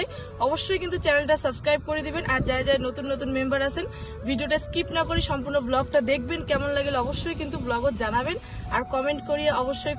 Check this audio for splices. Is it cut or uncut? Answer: uncut